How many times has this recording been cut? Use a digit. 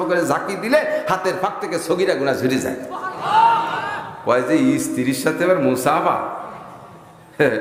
0